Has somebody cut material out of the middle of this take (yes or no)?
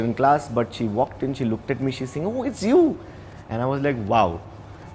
no